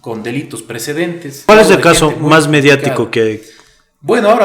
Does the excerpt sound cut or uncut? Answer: cut